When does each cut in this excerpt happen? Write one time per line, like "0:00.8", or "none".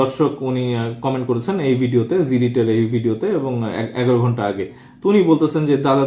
none